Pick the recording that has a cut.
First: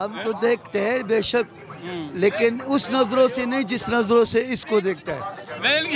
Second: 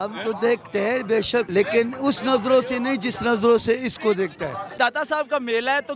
second; 2 cuts; at 1.5 s, 4.7 s

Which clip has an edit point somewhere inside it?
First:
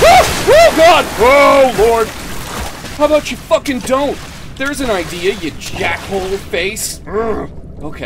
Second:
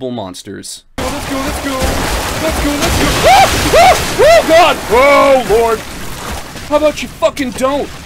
second; 1 cut; at 1.0 s

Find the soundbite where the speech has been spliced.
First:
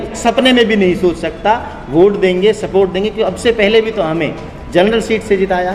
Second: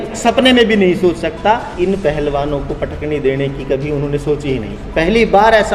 second; 1 cut; at 1.7 s

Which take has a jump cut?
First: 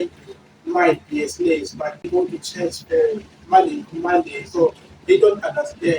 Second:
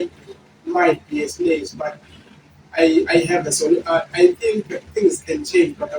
first; 1 cut; at 2.1 s

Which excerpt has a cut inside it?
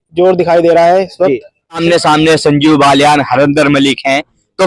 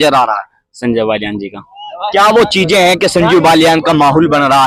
first; 1 cut; at 1.8 s

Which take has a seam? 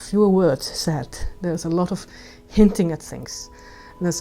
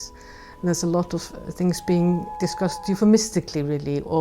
second; 1 cut; at 2.3 s

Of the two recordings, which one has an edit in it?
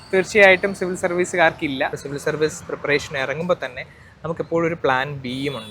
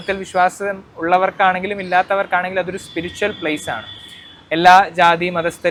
first; 1 cut; at 2.0 s

